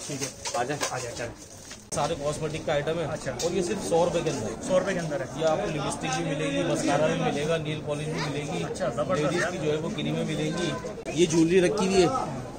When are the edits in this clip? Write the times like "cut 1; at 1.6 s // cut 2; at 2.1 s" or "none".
cut 1; at 1.9 s // cut 2; at 11.0 s